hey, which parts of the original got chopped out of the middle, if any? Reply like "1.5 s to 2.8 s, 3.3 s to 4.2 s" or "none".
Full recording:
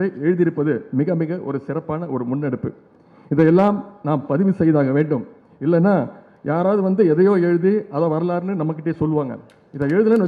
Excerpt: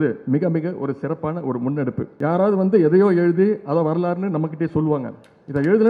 2.7 s to 6.3 s